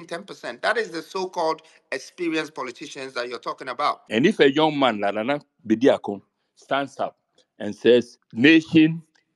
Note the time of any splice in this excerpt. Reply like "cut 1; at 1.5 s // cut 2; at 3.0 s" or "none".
cut 1; at 4.0 s // cut 2; at 8.2 s